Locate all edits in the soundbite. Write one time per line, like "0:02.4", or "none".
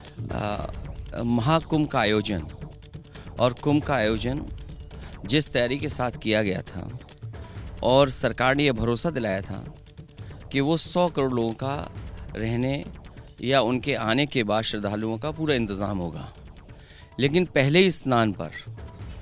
none